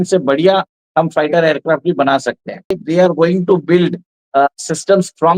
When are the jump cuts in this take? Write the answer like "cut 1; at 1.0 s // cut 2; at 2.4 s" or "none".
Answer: cut 1; at 2.8 s